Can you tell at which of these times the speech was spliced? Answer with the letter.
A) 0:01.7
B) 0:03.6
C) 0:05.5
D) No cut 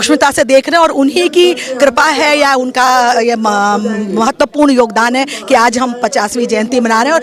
D